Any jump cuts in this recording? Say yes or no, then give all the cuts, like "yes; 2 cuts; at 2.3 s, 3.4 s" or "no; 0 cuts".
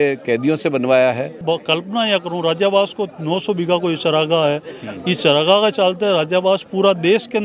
yes; 1 cut; at 1.4 s